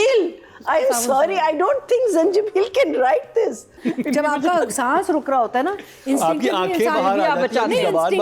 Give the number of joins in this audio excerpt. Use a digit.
1